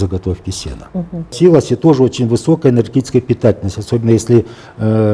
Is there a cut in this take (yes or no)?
yes